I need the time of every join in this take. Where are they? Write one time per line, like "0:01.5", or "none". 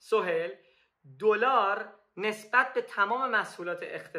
none